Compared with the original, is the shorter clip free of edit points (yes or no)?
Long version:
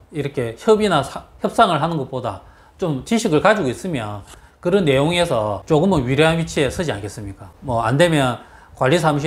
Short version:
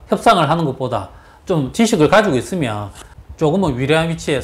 no